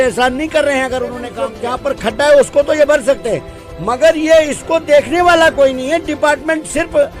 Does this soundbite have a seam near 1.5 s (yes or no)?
yes